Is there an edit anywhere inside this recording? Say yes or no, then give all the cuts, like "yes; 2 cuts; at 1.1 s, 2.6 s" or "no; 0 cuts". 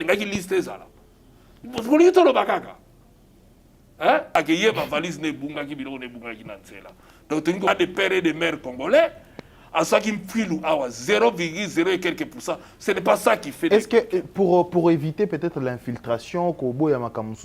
yes; 2 cuts; at 4.4 s, 7.7 s